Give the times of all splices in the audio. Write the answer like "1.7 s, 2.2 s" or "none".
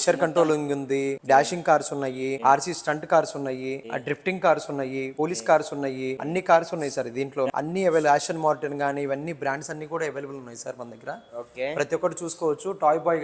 1.2 s, 2.4 s, 3.8 s, 5.1 s, 6.2 s, 7.5 s